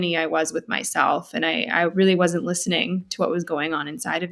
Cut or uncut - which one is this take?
uncut